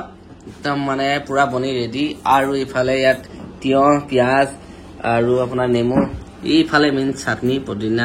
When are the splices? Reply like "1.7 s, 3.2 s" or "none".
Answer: none